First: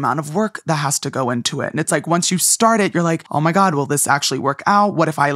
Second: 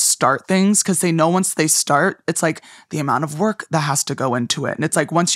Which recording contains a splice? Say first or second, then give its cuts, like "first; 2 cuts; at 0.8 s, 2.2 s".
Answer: first; 1 cut; at 3.2 s